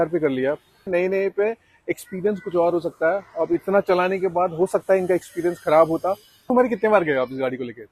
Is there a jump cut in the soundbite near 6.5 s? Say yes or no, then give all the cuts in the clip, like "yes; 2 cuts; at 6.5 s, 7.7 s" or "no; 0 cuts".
yes; 2 cuts; at 0.9 s, 6.5 s